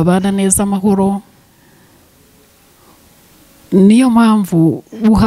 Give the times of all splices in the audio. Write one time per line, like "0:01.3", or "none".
none